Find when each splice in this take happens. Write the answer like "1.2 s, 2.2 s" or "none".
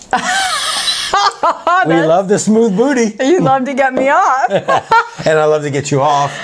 none